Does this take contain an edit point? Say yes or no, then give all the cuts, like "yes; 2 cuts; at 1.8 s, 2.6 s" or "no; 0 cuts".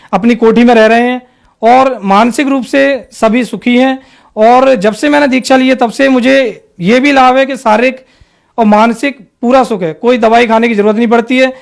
no; 0 cuts